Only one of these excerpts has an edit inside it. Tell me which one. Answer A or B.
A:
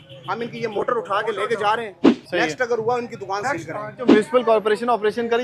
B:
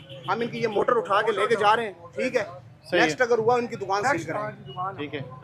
A